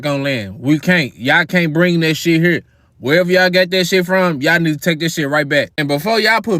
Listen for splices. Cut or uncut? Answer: uncut